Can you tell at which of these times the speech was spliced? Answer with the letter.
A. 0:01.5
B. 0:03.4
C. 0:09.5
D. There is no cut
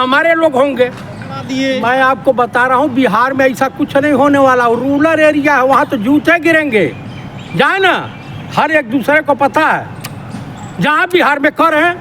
A